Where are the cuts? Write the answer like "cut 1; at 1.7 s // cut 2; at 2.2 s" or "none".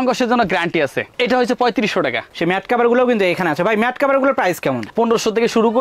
cut 1; at 2.3 s